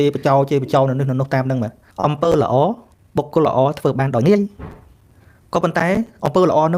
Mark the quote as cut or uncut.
cut